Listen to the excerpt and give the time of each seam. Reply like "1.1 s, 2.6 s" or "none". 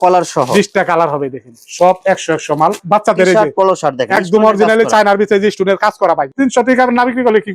2.8 s, 6.3 s